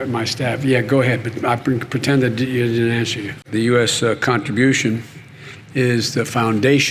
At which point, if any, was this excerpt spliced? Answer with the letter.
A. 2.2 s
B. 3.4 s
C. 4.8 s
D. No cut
B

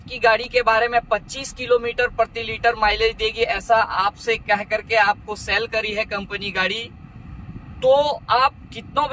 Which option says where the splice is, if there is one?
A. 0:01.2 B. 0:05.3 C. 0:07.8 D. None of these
D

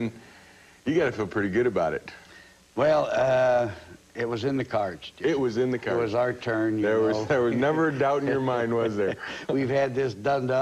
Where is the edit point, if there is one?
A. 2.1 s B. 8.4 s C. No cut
A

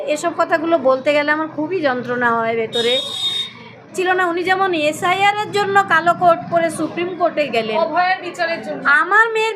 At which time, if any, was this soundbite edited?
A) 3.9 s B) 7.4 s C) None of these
A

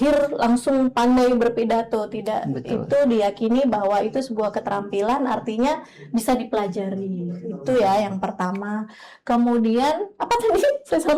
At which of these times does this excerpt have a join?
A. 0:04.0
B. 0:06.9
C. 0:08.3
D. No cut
D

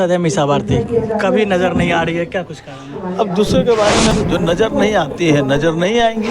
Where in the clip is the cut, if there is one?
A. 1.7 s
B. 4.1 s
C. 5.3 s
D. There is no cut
B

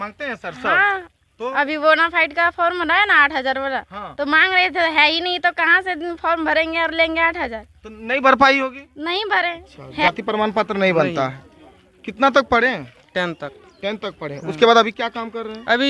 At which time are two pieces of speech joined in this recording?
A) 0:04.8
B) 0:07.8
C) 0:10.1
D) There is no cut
C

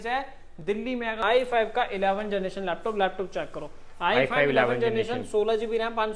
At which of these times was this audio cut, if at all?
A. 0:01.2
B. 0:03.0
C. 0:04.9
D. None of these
A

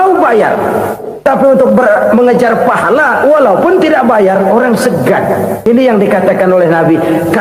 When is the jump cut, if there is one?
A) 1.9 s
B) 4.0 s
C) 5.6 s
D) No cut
C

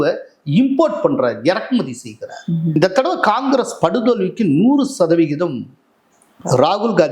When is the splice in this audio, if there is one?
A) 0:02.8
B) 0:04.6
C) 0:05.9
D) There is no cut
A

